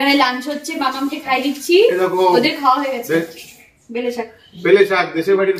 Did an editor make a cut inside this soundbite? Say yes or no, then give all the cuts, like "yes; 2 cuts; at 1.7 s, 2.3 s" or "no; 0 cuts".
no; 0 cuts